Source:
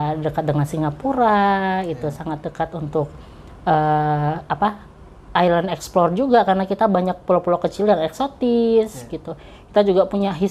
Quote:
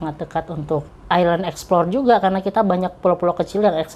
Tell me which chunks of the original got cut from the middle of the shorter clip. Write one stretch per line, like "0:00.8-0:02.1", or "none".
0:03.2-0:05.2